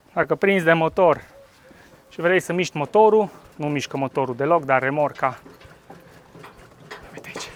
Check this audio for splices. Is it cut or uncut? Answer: uncut